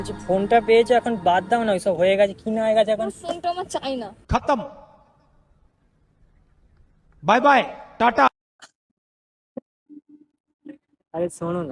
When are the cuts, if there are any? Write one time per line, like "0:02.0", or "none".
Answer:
0:08.3